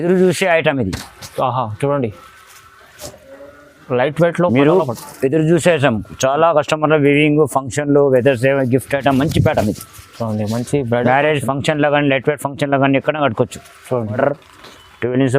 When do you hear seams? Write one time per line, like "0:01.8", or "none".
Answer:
0:14.2